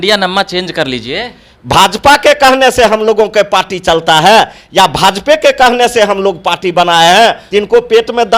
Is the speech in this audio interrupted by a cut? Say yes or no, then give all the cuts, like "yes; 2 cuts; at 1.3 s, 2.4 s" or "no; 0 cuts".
yes; 1 cut; at 7.4 s